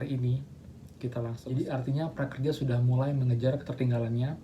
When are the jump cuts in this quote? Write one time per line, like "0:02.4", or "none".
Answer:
0:01.4